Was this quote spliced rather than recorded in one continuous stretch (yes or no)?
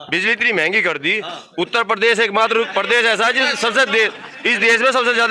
no